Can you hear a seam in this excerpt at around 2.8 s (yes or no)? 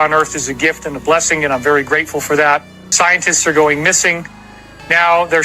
yes